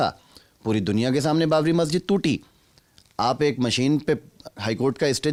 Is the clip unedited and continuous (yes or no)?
yes